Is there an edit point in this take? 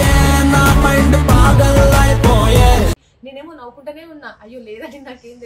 yes; 1 cut; at 3.1 s

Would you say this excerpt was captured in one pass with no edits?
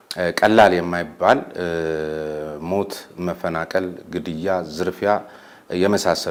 yes; 0 cuts

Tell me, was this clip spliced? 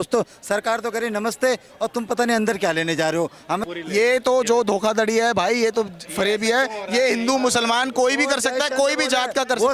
yes; 1 cut; at 3.6 s

